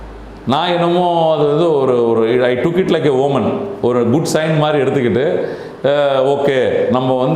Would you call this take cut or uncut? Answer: uncut